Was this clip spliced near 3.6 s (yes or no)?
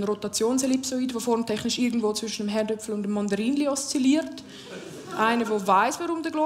yes